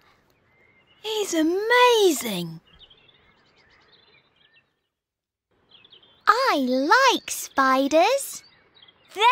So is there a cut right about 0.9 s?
no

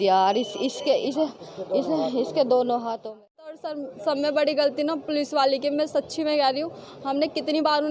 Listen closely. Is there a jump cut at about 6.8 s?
no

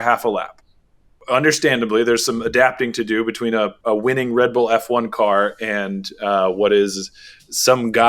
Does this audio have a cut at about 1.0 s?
yes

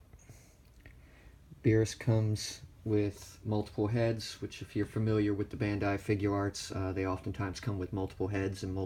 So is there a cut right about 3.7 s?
yes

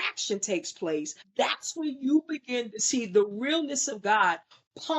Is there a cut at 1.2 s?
yes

